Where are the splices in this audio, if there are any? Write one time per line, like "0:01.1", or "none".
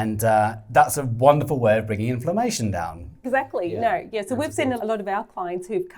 0:03.2
0:04.8